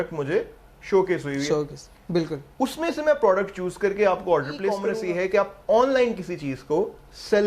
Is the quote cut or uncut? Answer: cut